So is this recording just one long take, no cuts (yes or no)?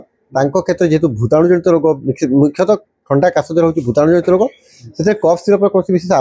yes